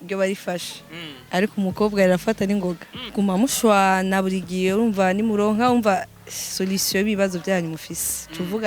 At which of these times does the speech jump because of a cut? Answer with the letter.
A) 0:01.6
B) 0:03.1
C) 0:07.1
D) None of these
B